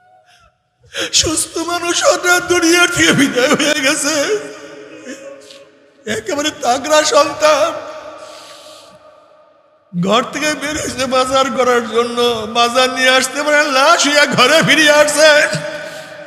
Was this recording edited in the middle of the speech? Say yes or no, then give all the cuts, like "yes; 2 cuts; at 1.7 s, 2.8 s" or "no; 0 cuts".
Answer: no; 0 cuts